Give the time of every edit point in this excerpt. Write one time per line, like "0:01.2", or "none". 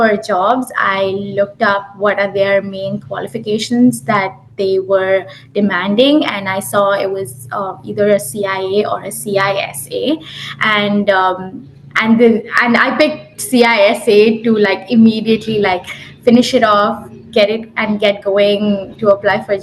none